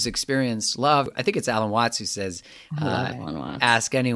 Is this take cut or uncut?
cut